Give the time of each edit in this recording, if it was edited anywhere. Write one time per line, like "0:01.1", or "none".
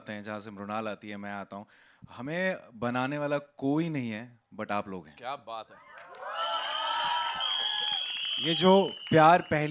none